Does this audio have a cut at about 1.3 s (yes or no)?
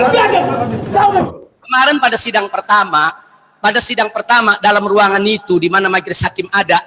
yes